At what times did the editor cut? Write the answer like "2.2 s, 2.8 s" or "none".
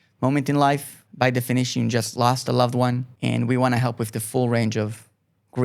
1.0 s, 3.1 s